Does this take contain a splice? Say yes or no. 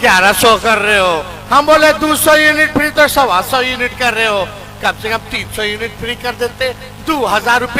no